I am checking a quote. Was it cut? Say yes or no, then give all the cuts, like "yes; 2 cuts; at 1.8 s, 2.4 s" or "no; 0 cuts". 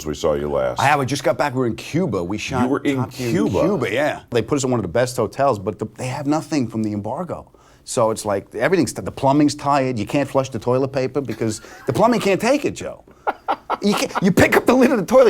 yes; 1 cut; at 4.3 s